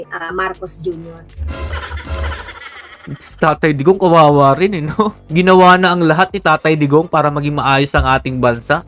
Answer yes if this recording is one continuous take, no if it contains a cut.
yes